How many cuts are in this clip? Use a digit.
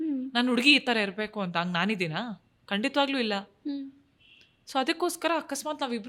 0